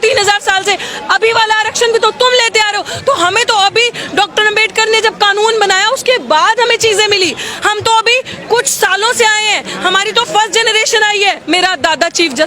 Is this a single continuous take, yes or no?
no